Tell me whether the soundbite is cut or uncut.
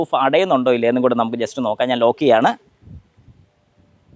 uncut